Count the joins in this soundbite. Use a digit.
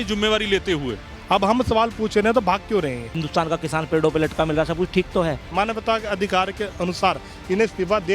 3